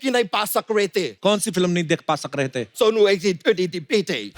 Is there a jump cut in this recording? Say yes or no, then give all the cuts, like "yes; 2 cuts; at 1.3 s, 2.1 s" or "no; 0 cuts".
yes; 2 cuts; at 1.1 s, 2.7 s